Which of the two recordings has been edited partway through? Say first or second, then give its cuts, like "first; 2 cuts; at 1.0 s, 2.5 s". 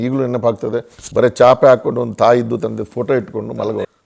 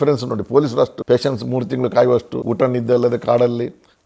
second; 2 cuts; at 1.0 s, 2.4 s